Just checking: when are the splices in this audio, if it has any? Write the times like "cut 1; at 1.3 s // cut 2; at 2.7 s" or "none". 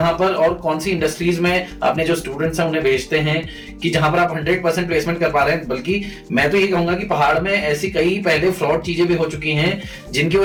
none